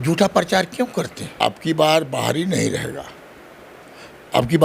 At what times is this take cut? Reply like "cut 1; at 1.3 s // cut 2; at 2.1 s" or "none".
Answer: cut 1; at 1.3 s